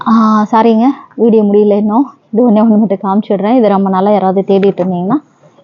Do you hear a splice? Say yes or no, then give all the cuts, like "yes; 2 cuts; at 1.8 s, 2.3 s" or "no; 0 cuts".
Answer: no; 0 cuts